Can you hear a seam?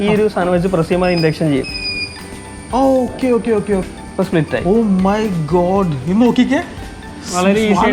yes; 1 cut; at 3.8 s

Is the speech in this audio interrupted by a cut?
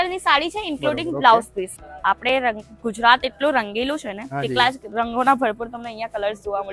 yes; 1 cut; at 1.8 s

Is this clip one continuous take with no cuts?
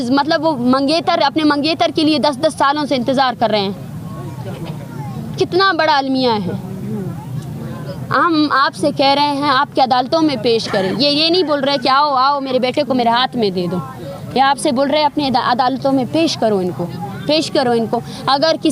yes; 0 cuts

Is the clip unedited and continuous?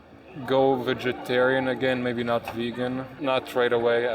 no; 1 cut; at 3.1 s

